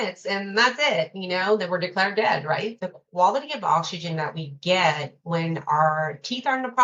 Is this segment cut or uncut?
cut